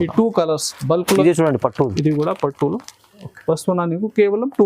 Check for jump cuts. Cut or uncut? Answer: cut